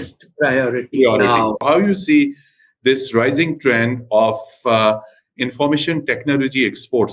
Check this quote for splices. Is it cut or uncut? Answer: cut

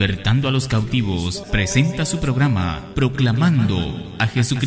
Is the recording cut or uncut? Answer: uncut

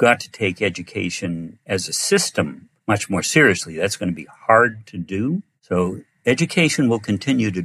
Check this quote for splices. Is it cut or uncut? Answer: cut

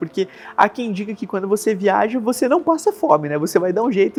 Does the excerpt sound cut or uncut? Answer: uncut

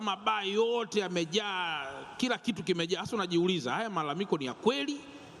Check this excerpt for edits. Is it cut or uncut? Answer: uncut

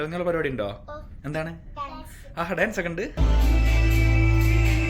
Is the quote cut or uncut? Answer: cut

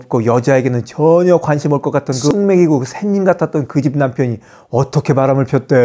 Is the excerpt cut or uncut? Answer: cut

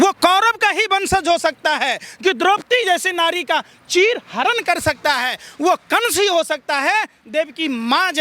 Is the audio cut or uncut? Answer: uncut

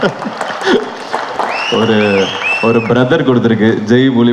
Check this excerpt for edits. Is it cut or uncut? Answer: uncut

